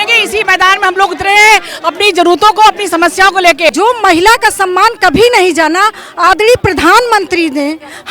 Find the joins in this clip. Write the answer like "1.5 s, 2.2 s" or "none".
3.7 s